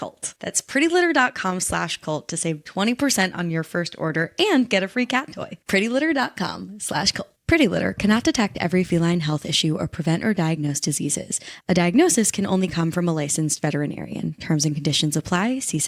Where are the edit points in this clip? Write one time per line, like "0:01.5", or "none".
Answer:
none

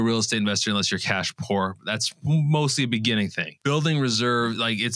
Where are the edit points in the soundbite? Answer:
0:03.5

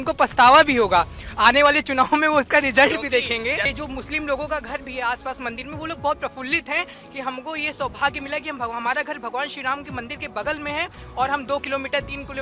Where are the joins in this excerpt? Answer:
0:03.7

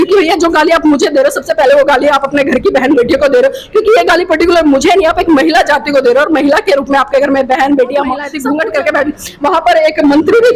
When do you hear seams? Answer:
0:08.3

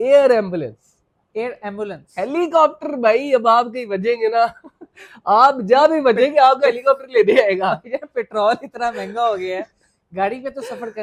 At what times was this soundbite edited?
none

